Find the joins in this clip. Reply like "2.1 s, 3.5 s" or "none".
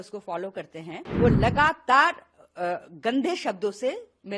1.0 s